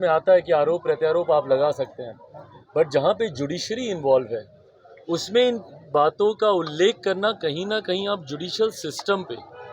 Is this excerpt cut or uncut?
uncut